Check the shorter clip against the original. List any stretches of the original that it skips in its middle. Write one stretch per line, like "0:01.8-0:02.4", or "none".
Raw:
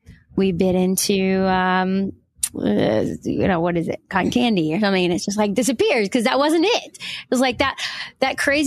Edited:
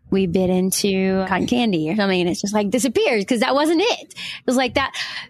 0:01.5-0:04.1